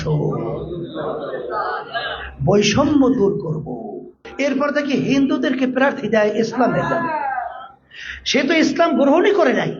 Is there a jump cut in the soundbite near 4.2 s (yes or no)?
yes